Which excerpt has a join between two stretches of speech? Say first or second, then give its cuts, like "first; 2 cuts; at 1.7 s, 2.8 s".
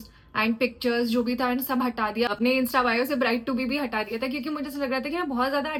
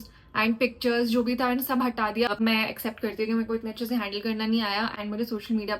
second; 1 cut; at 2.3 s